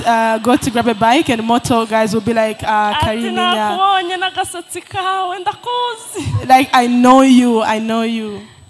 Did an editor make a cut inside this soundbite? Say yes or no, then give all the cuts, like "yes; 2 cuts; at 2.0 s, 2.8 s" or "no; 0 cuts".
no; 0 cuts